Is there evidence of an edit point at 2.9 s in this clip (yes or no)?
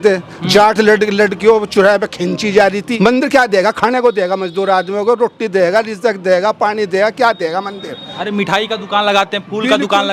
yes